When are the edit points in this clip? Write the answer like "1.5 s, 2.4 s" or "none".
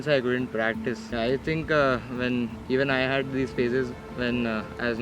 1.0 s